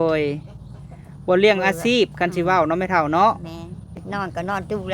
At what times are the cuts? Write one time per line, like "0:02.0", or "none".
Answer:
0:04.0